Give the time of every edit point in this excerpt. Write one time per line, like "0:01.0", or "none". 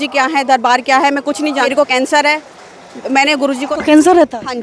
0:01.7
0:03.7